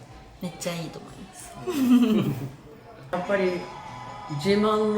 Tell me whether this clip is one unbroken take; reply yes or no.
no